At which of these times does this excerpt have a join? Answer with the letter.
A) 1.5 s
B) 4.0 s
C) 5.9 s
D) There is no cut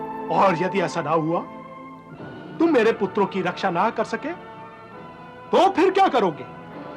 D